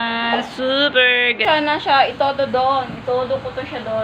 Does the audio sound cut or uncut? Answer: cut